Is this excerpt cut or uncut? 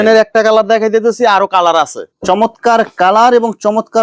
cut